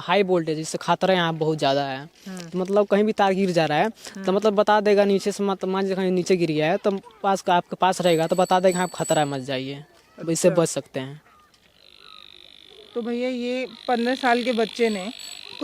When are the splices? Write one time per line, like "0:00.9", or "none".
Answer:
none